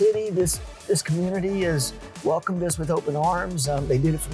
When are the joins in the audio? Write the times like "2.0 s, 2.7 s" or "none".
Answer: none